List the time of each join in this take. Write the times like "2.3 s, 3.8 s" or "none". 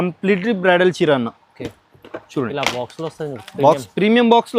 none